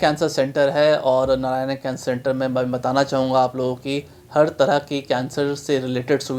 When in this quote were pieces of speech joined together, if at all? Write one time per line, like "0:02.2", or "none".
none